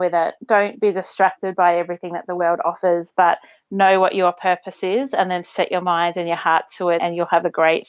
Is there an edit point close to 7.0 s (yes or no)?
yes